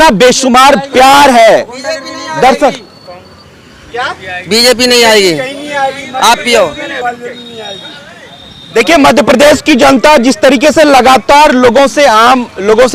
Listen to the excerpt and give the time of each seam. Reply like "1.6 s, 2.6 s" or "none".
none